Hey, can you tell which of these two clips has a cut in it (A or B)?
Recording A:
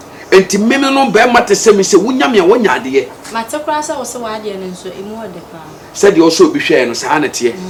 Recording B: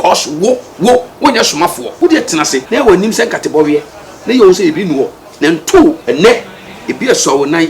B